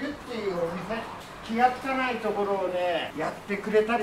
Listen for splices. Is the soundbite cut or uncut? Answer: cut